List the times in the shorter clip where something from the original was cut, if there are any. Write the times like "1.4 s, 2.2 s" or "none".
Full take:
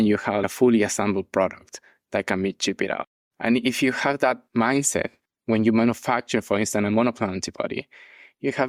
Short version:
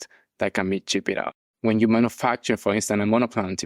1.4 s